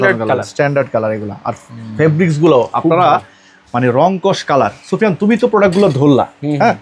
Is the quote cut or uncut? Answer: uncut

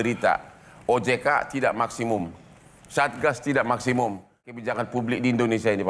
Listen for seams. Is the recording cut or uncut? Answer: cut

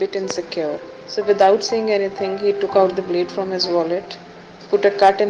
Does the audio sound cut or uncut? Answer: cut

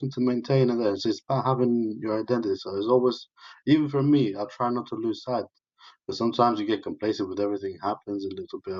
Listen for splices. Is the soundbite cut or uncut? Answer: uncut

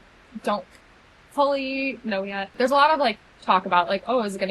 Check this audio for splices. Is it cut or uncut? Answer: cut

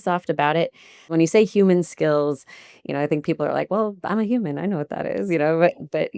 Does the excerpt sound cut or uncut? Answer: cut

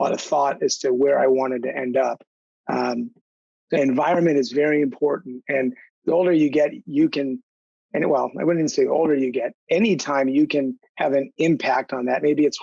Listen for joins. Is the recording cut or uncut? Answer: uncut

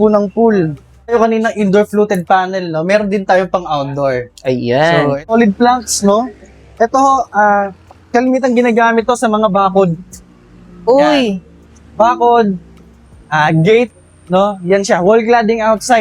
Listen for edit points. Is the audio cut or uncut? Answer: cut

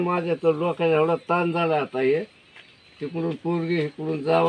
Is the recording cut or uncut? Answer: uncut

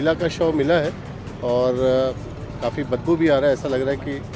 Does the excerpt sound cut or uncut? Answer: uncut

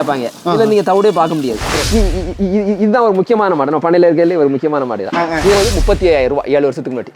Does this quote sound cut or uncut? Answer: cut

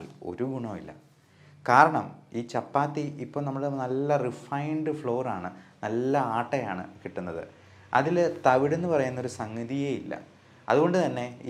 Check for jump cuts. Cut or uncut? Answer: uncut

